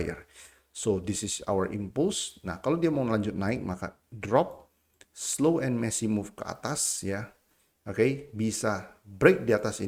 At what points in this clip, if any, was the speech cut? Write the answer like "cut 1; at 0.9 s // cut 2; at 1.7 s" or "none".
none